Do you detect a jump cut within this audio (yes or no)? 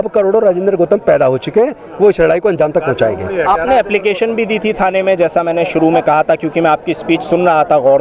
no